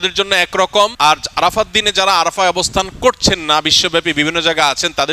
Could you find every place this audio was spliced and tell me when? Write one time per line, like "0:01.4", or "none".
0:00.9

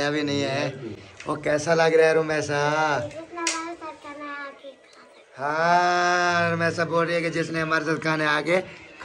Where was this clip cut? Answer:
none

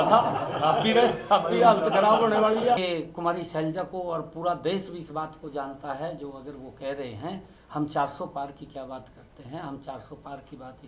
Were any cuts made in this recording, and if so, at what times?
0:02.8

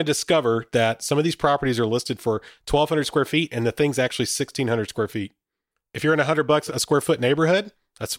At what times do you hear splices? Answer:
0:06.7

